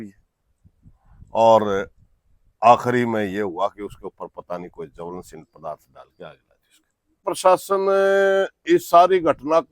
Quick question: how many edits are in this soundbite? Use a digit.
1